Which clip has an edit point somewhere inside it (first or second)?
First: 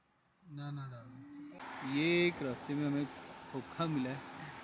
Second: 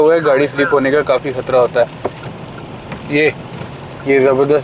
second